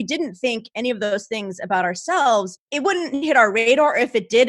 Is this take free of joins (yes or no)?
no